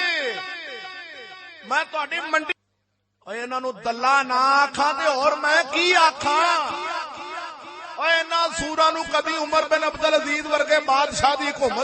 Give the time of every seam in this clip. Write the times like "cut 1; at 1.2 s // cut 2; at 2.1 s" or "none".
cut 1; at 2.5 s